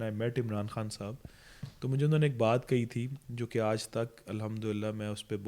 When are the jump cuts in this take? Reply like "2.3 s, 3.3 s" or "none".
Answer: none